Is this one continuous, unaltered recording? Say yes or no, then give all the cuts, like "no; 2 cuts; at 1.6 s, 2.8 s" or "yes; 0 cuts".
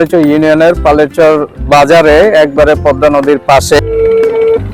no; 1 cut; at 3.8 s